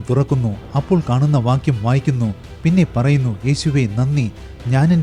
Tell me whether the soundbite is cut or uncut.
uncut